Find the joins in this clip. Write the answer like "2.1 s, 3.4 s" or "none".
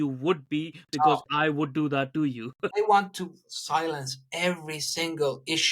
2.6 s